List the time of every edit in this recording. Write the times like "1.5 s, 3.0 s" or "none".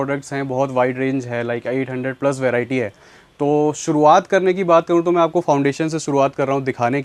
none